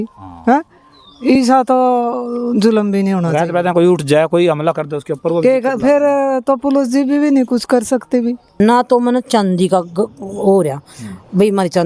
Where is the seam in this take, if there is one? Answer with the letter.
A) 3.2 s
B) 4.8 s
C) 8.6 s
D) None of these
C